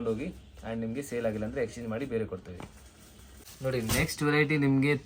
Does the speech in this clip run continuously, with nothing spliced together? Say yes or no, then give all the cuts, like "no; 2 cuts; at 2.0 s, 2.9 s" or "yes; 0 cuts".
yes; 0 cuts